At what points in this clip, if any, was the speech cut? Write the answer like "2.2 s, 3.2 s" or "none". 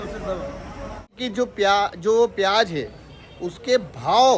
1.2 s